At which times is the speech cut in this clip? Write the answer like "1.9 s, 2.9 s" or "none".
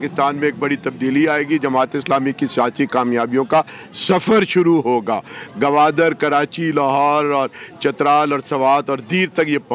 none